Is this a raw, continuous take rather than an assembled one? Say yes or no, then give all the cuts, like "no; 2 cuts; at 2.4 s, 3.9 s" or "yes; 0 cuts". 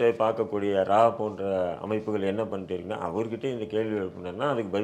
yes; 0 cuts